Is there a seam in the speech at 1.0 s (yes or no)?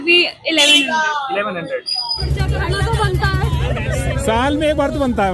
no